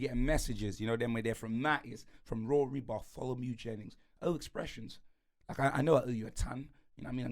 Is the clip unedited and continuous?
yes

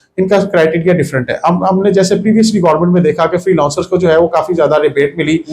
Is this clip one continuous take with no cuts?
yes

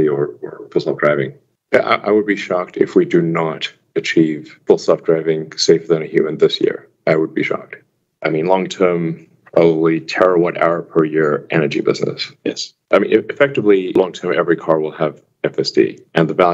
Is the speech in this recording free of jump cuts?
no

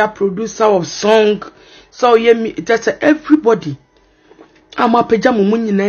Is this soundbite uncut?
yes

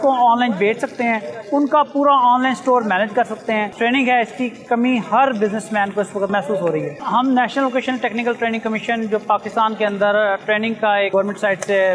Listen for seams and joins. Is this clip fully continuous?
yes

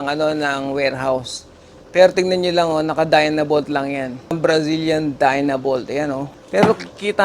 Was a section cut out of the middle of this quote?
yes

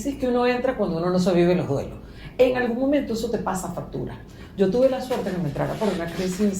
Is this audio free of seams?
yes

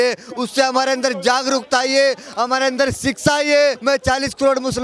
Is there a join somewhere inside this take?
yes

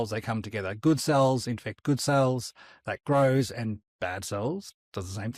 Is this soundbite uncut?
yes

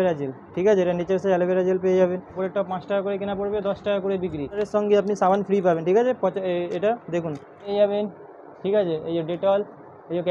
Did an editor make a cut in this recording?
yes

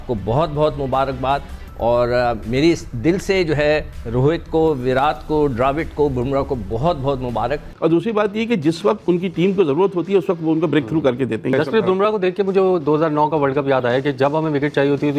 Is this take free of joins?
no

